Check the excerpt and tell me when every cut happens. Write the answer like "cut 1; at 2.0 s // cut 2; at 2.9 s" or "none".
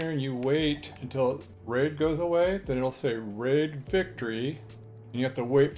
cut 1; at 1.3 s